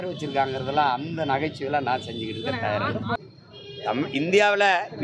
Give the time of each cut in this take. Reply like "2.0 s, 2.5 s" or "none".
3.2 s